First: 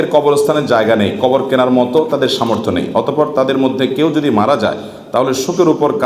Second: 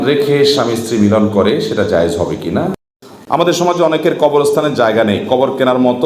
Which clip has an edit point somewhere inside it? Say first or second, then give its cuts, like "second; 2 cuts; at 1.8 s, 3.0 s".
second; 1 cut; at 2.8 s